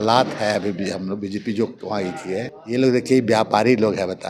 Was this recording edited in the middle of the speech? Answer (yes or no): yes